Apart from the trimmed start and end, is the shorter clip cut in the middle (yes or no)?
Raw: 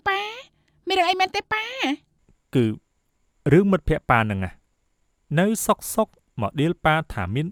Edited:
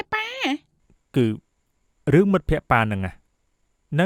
no